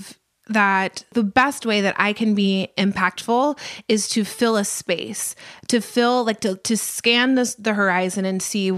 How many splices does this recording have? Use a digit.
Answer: 1